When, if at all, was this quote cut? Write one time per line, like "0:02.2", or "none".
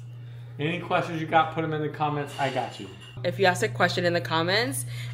0:03.1